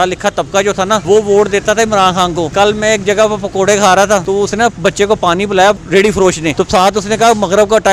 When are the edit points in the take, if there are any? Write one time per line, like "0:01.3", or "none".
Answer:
0:01.0
0:02.5
0:04.2
0:06.0